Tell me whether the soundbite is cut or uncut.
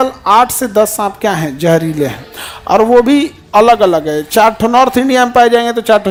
uncut